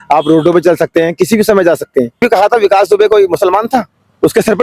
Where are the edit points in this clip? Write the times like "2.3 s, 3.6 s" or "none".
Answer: 2.2 s

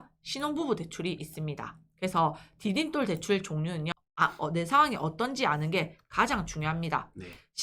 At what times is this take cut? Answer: 3.9 s

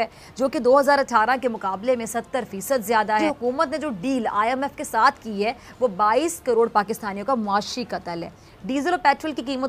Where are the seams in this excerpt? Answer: 3.2 s

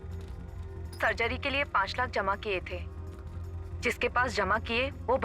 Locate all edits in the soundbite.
none

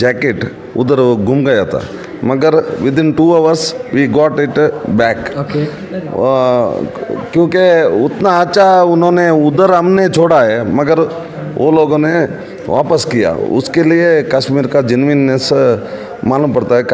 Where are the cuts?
none

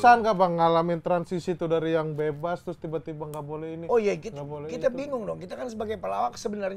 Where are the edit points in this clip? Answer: none

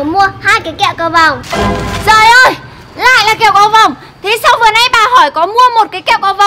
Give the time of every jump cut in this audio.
1.4 s

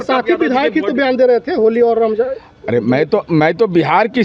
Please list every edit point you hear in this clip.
none

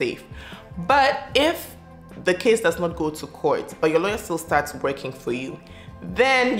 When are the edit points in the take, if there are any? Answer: none

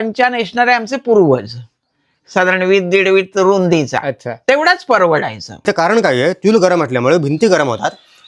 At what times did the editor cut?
5.6 s

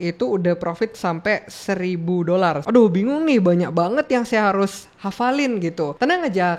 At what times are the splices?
2.6 s

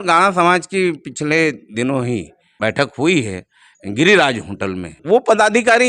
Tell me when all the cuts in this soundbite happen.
2.4 s, 5.0 s

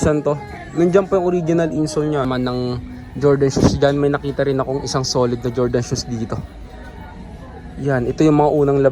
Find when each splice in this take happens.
2.2 s

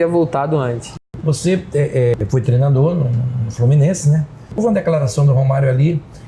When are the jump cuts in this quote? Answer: 0.9 s, 2.2 s, 4.6 s

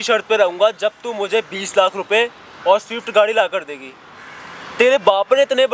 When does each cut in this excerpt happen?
none

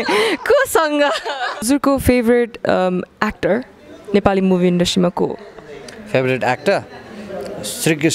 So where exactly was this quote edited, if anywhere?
1.6 s

